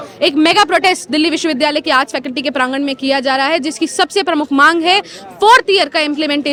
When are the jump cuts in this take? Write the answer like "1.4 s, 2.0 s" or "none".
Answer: none